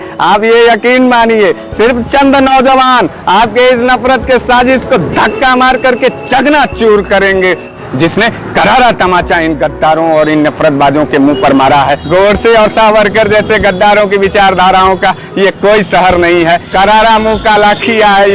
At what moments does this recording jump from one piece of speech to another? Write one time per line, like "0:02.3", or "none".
0:07.8
0:12.0
0:16.7